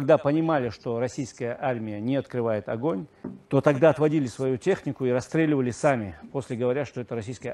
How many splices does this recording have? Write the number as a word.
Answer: one